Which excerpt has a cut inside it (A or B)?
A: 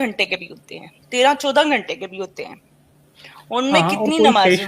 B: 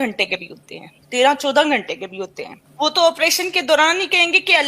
B